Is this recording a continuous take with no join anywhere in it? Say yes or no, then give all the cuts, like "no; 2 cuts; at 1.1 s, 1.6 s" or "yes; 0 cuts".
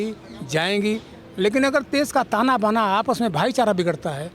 yes; 0 cuts